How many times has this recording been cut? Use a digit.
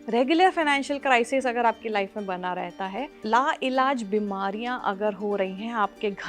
1